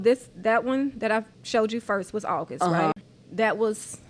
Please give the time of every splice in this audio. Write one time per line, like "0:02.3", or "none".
0:01.4
0:03.1